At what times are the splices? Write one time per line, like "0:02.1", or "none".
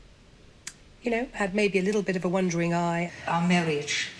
none